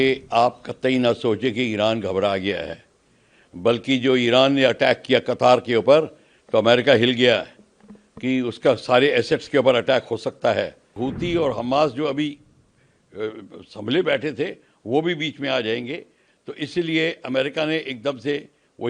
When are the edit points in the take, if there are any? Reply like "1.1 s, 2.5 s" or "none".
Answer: 11.0 s